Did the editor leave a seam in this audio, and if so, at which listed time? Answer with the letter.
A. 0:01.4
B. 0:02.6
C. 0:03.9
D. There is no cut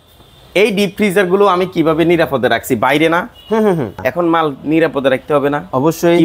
C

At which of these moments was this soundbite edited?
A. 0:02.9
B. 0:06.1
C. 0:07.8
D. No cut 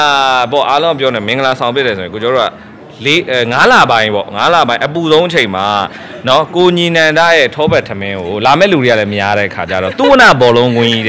D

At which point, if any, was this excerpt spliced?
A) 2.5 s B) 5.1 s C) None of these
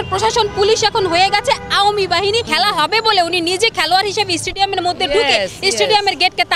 A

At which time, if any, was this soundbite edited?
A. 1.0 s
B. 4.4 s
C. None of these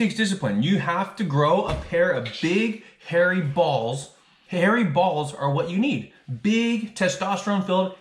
B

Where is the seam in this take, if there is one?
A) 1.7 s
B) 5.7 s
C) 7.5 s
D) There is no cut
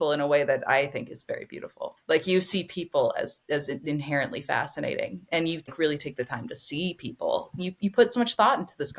B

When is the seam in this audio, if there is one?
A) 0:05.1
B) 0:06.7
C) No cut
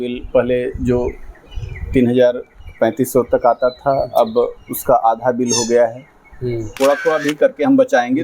B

